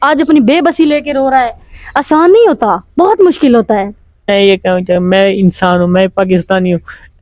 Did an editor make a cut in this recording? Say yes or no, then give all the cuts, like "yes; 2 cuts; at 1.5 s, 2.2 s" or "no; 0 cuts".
yes; 1 cut; at 4.2 s